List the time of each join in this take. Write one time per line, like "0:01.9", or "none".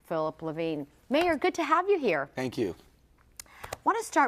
0:03.1